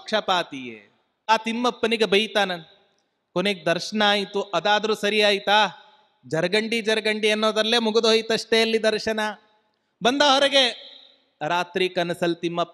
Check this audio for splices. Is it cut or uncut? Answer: cut